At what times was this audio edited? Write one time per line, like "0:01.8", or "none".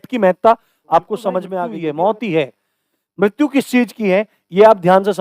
0:01.5